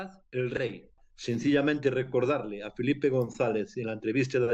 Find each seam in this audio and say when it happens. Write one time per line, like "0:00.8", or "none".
0:01.1